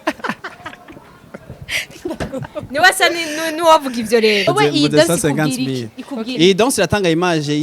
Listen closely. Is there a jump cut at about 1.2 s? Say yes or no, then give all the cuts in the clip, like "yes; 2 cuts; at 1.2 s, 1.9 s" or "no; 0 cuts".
no; 1 cut; at 4.4 s